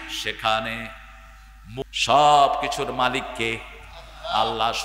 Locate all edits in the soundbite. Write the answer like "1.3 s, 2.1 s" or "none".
1.8 s